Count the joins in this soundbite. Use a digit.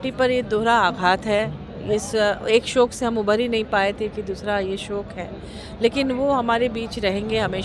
0